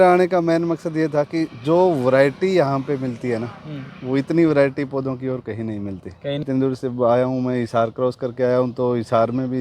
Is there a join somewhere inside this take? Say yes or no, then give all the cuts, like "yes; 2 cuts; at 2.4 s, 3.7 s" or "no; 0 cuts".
yes; 1 cut; at 6.4 s